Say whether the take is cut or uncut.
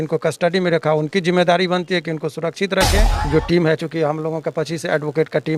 cut